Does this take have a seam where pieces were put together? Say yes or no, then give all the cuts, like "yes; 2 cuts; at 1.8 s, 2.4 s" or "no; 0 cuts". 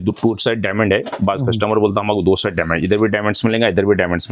no; 0 cuts